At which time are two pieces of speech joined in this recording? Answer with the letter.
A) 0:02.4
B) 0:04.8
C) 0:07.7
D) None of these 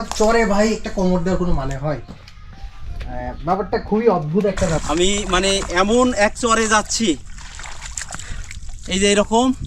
B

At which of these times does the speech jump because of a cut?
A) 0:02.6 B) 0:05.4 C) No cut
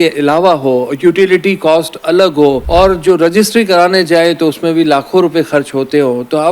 A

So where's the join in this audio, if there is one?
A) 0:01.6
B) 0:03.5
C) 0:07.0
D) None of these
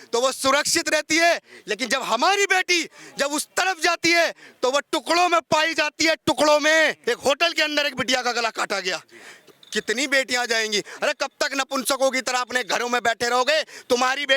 C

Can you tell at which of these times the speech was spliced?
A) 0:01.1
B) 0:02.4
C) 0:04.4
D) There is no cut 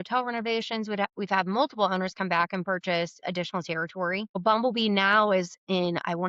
C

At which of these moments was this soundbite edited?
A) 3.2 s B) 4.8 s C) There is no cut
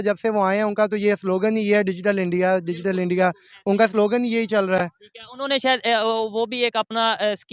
C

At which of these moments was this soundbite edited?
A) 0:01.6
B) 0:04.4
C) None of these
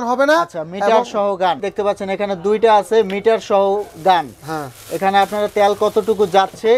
A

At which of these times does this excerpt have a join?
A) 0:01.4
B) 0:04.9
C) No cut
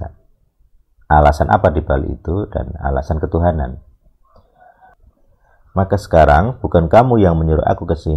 B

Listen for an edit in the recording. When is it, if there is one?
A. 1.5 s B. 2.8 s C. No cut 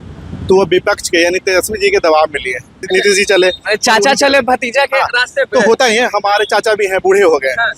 B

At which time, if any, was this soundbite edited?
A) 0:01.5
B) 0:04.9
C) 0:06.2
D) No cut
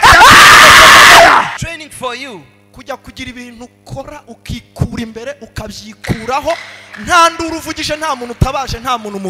A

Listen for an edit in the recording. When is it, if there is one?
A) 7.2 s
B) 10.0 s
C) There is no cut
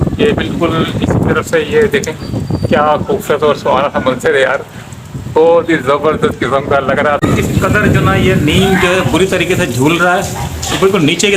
A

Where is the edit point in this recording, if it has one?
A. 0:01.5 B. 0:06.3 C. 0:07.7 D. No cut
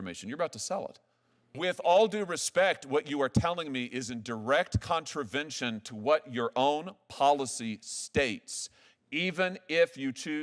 A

